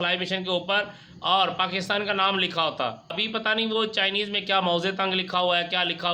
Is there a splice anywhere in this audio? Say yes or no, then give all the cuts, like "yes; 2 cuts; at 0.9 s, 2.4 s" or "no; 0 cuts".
yes; 1 cut; at 3.2 s